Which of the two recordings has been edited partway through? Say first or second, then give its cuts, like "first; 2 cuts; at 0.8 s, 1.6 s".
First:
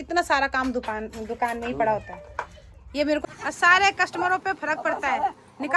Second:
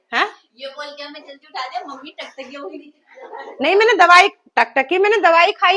first; 1 cut; at 3.2 s